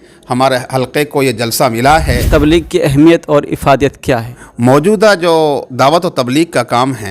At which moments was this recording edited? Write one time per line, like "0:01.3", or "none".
0:02.2